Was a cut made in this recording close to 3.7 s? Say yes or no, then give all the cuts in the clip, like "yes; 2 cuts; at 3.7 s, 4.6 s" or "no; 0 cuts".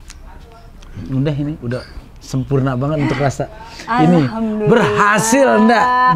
no; 0 cuts